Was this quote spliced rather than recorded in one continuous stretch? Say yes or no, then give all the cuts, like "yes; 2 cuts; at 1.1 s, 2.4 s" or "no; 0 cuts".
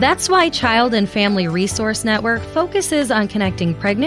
no; 0 cuts